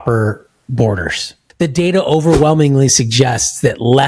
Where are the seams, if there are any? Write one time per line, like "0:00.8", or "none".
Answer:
0:01.4

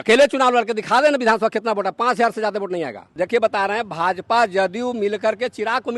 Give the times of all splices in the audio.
0:03.0

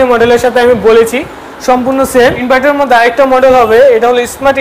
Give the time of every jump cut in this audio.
0:02.4

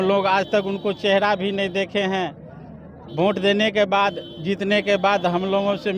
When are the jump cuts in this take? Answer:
none

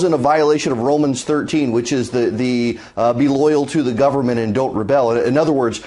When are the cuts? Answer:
0:03.7

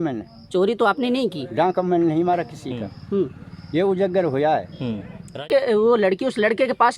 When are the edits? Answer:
0:05.4

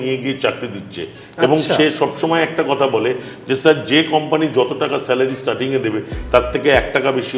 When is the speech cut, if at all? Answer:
none

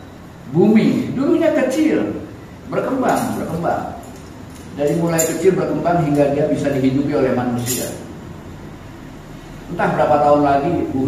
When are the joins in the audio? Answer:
none

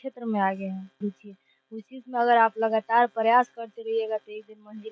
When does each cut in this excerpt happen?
0:01.0

